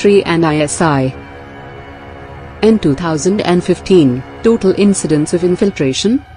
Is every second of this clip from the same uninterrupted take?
yes; 0 cuts

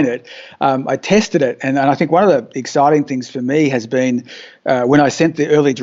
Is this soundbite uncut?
yes; 0 cuts

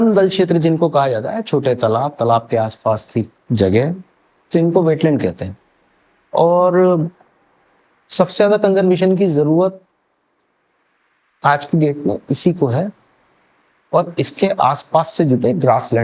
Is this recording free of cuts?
yes; 0 cuts

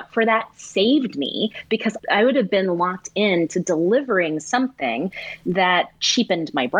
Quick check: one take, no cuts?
yes; 0 cuts

